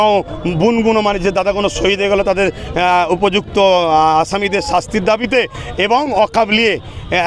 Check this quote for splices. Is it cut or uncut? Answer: uncut